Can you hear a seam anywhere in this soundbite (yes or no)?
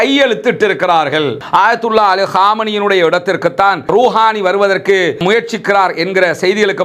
yes